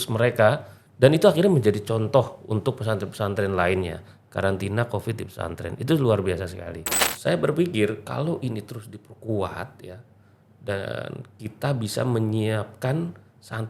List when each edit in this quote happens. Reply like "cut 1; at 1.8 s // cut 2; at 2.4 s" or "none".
cut 1; at 7.1 s